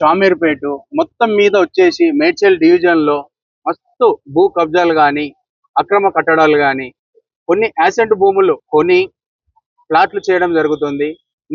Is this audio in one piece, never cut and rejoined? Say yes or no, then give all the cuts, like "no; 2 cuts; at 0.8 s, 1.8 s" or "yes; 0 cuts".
yes; 0 cuts